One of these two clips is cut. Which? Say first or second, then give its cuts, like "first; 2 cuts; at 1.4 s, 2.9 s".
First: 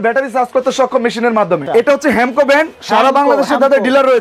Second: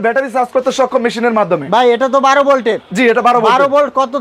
first; 1 cut; at 1.6 s